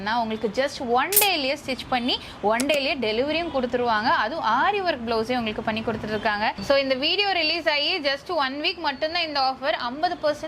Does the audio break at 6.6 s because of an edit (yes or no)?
yes